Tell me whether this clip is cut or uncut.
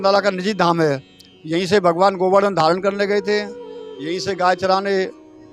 uncut